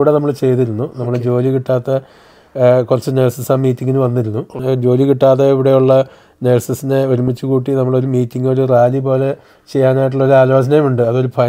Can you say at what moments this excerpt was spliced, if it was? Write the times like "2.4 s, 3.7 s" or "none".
4.5 s